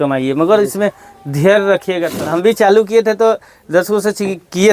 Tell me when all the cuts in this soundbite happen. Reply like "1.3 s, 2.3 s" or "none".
2.1 s

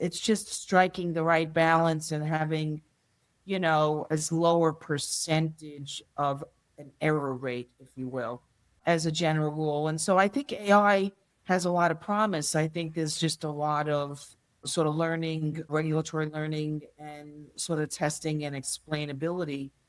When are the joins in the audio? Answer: 8.8 s, 14.6 s

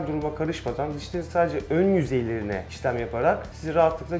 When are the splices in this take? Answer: none

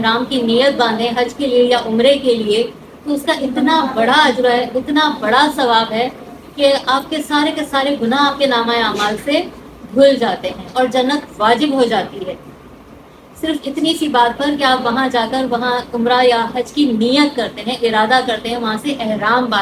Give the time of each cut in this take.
none

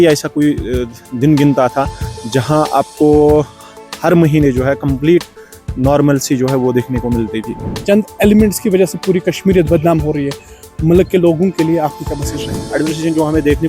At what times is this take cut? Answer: 7.7 s, 12.6 s

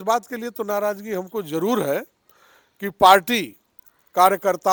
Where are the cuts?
none

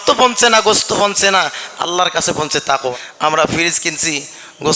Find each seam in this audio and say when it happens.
2.9 s

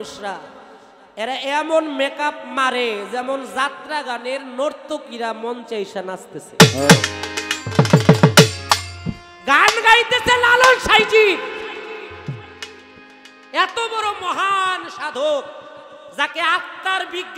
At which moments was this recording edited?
none

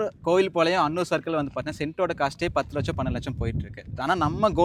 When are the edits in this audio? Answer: none

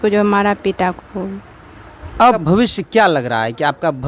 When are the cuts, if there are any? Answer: 2.3 s

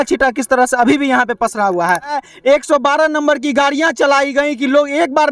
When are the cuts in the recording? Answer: 2.2 s

